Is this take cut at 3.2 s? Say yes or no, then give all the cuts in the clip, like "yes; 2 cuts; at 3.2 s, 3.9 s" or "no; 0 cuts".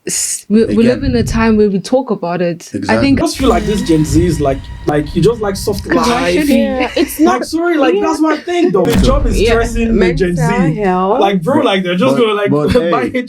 yes; 3 cuts; at 3.2 s, 4.9 s, 8.9 s